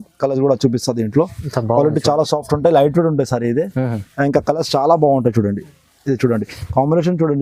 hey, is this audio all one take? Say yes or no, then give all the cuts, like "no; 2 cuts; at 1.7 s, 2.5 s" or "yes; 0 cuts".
yes; 0 cuts